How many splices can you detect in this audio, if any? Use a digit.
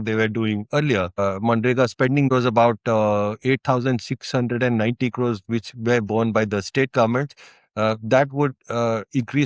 2